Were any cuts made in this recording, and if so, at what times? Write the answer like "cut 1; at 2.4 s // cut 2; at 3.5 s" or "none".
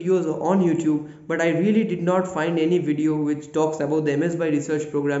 none